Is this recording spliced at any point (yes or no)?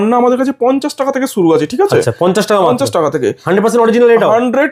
no